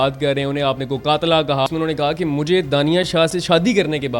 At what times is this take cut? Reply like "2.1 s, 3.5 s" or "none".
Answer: 1.7 s